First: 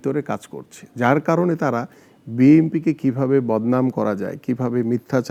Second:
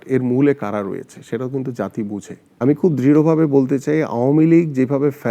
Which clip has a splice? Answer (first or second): second